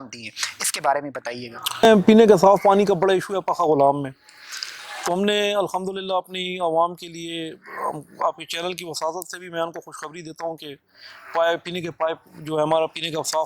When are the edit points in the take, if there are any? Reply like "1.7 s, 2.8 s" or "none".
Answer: 1.8 s